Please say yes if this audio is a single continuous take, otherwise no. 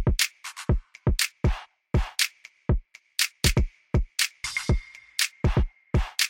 yes